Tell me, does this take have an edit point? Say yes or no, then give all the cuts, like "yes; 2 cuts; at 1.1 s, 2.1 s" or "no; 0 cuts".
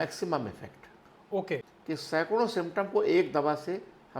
yes; 1 cut; at 1.3 s